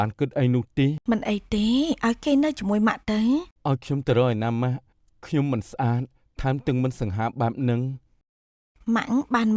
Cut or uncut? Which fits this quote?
cut